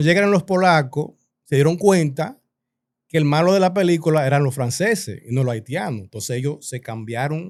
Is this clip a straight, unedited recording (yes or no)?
yes